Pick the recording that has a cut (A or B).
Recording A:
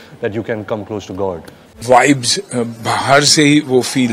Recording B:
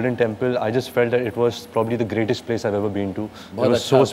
A